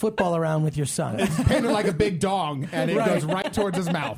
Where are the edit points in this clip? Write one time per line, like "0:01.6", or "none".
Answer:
0:01.1